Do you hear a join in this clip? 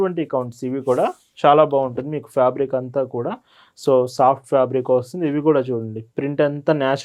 no; 0 cuts

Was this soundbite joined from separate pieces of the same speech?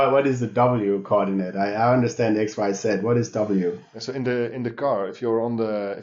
yes; 1 cut; at 3.9 s

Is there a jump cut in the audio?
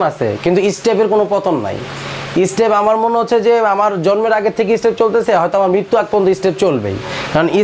no; 0 cuts

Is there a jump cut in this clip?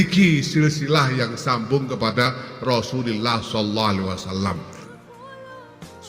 yes; 1 cut; at 4.8 s

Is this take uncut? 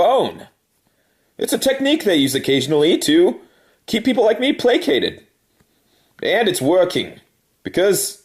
no; 1 cut; at 1.5 s

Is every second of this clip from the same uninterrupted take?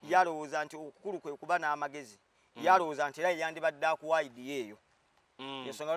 yes; 0 cuts

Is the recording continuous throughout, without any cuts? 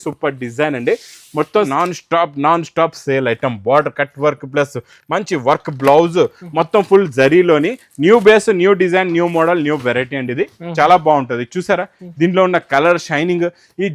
no; 1 cut; at 1.7 s

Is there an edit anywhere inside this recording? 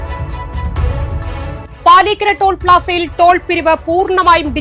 yes; 1 cut; at 1.7 s

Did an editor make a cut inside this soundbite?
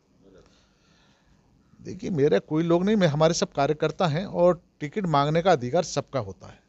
no; 0 cuts

